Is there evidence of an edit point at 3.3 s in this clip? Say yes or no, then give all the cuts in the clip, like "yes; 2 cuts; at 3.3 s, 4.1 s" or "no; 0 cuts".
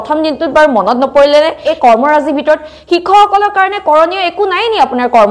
no; 1 cut; at 1.7 s